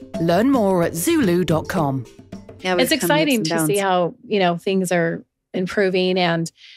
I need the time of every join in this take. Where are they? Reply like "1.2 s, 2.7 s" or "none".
2.5 s

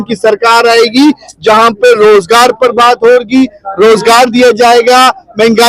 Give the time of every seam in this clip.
none

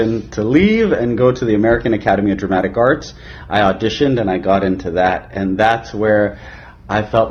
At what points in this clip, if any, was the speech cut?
none

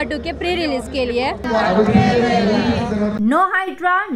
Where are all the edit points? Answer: 1.4 s, 3.1 s

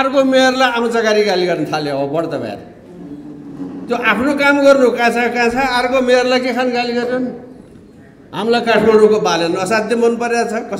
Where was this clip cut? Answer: none

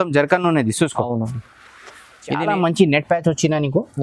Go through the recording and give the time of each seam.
2.4 s

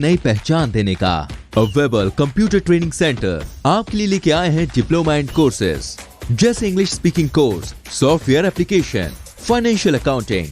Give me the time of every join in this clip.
none

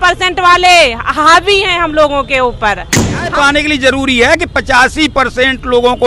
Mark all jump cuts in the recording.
3.3 s

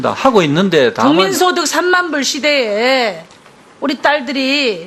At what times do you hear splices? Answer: 2.6 s

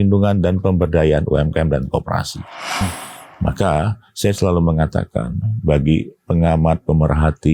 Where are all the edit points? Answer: 2.8 s

